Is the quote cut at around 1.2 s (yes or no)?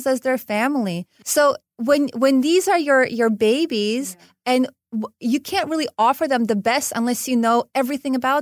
yes